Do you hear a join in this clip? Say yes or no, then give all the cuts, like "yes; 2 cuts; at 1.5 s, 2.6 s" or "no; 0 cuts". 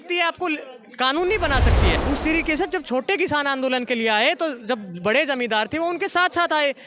yes; 1 cut; at 2.0 s